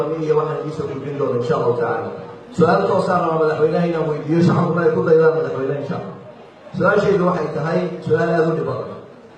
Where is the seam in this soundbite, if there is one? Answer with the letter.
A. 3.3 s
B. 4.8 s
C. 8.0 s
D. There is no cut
B